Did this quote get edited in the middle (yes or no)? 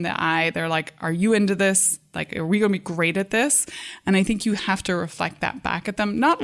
no